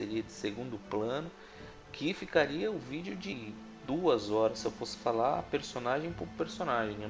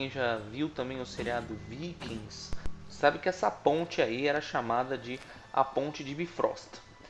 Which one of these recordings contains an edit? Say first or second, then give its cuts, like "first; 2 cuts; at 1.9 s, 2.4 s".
first; 1 cut; at 2.2 s